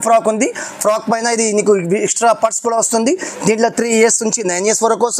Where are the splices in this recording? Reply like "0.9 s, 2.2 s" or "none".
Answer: none